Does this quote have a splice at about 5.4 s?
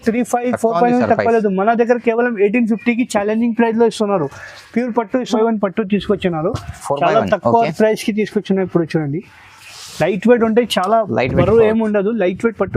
yes; 1 cut; at 5.4 s

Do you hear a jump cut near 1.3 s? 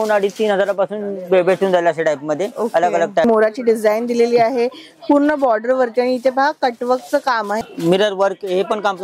no; 2 cuts; at 3.2 s, 7.6 s

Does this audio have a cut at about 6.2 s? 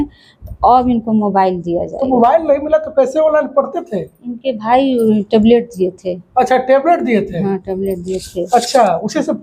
no; 0 cuts

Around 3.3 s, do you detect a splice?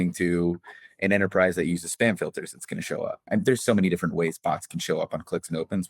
yes; 1 cut; at 3.3 s

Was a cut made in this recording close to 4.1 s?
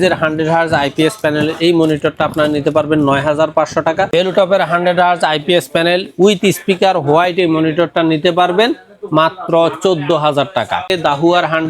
yes; 2 cuts; at 4.1 s, 10.9 s

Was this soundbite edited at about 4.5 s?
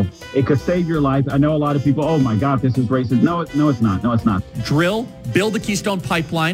yes; 1 cut; at 4.5 s

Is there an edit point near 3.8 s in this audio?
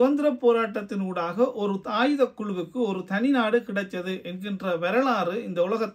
no; 0 cuts

